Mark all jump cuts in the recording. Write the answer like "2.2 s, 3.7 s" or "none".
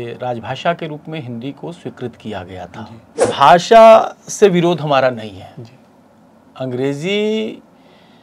3.2 s